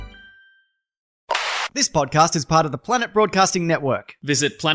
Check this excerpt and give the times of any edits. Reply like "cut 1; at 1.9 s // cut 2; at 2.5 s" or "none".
cut 1; at 1.4 s

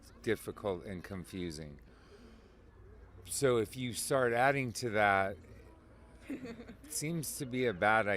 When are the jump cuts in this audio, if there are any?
none

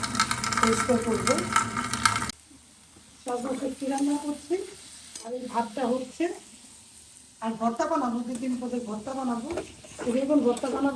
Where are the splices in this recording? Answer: cut 1; at 2.3 s

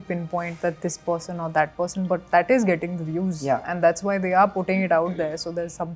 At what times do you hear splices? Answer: none

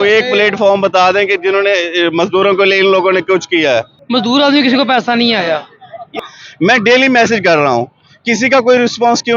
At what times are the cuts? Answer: cut 1; at 4.0 s // cut 2; at 6.2 s

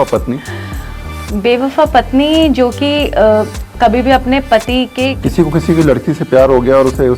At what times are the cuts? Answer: cut 1; at 5.2 s

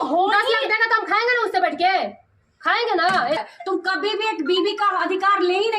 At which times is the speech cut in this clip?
cut 1; at 3.4 s

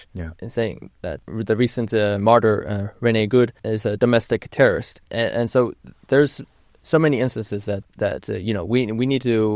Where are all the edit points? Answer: cut 1; at 1.2 s // cut 2; at 3.7 s // cut 3; at 5.0 s // cut 4; at 7.8 s

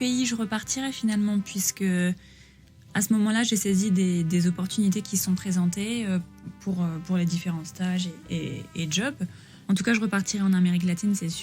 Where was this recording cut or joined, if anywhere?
cut 1; at 9.5 s

